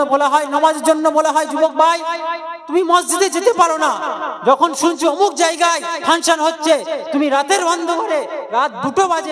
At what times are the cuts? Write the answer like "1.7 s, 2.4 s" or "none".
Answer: none

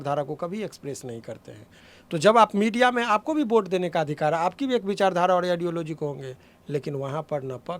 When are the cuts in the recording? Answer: none

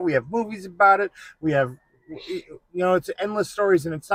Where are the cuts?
none

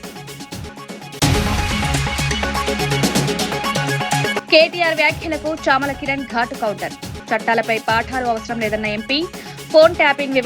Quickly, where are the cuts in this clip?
1.0 s, 4.4 s

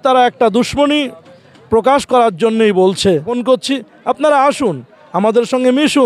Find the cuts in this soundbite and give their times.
3.3 s

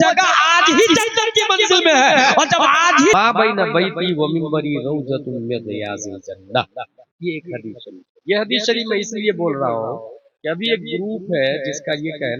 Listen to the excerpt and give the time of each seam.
3.1 s

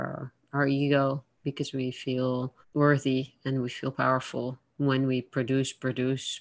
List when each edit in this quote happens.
2.6 s, 4.6 s

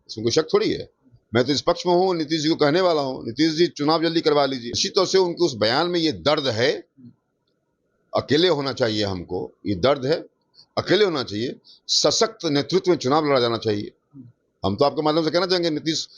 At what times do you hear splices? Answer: 4.7 s

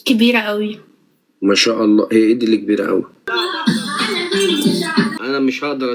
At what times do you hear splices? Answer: 3.1 s, 5.2 s

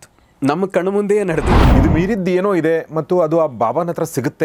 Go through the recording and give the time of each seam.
1.6 s

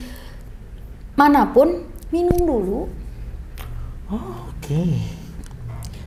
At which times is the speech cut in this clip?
none

